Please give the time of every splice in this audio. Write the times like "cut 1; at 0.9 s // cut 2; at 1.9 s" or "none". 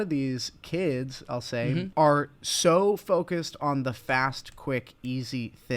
cut 1; at 1.9 s